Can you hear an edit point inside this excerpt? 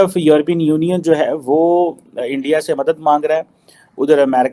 no; 0 cuts

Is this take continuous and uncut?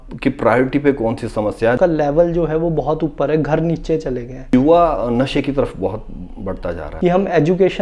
no; 3 cuts; at 1.8 s, 4.5 s, 6.9 s

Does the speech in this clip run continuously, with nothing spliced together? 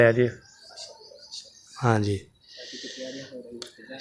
yes; 0 cuts

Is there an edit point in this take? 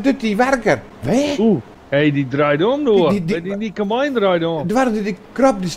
yes; 2 cuts; at 0.9 s, 1.7 s

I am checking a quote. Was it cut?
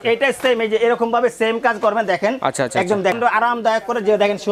yes; 1 cut; at 3.2 s

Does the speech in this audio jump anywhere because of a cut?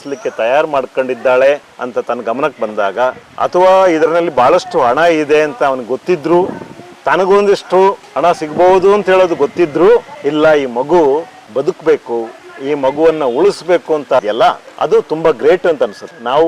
no; 0 cuts

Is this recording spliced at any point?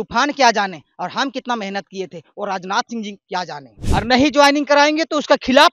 yes; 1 cut; at 3.7 s

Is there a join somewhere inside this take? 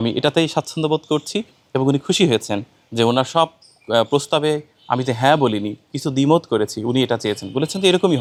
no; 0 cuts

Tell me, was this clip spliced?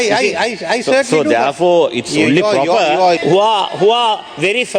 yes; 1 cut; at 3.2 s

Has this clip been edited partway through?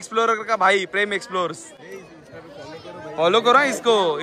no; 0 cuts

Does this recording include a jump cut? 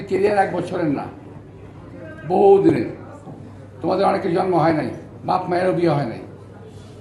no; 0 cuts

